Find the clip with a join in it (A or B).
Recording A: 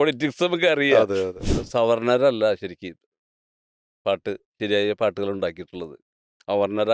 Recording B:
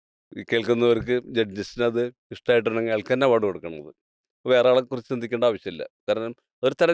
A